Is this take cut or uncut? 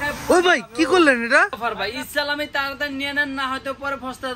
cut